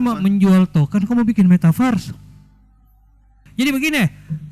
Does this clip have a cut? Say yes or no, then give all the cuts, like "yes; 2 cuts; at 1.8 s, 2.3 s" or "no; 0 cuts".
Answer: yes; 1 cut; at 3.4 s